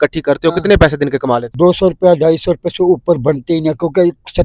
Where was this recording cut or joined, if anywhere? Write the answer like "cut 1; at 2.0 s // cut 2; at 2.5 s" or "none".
cut 1; at 1.5 s